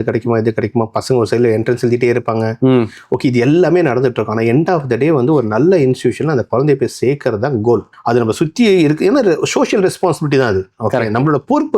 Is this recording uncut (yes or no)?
no